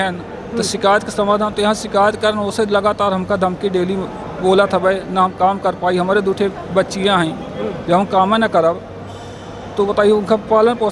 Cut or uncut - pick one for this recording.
uncut